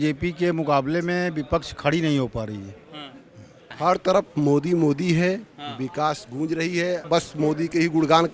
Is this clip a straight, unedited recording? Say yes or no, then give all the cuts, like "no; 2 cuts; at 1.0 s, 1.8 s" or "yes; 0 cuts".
no; 2 cuts; at 3.6 s, 7.0 s